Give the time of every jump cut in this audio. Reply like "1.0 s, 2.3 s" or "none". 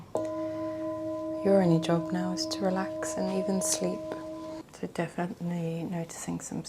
4.6 s